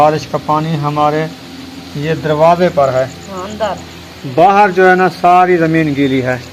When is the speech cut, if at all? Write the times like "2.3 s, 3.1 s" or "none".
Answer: none